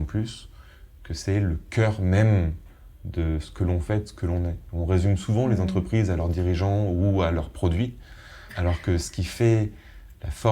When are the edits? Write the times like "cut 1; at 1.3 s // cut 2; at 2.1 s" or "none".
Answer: cut 1; at 8.5 s